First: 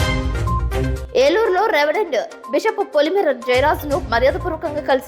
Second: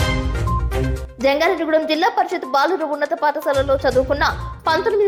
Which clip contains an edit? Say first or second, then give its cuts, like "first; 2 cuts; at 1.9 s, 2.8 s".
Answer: first; 1 cut; at 1.0 s